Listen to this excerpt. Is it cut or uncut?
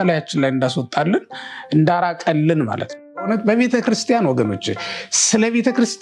cut